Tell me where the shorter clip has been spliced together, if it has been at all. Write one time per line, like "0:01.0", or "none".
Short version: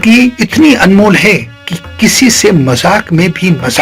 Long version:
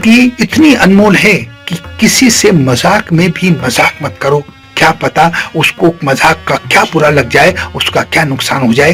none